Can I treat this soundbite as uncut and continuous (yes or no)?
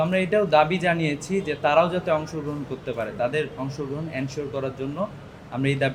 yes